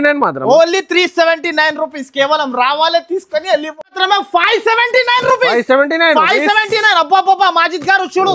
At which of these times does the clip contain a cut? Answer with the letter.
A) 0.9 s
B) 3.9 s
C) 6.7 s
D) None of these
B